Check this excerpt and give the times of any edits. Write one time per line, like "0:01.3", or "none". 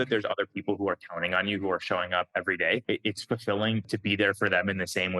0:02.8
0:03.8